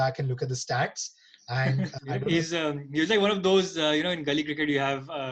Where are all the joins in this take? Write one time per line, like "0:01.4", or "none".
0:02.0